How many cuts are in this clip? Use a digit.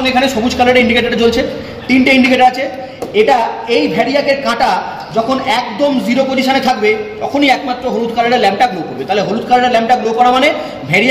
0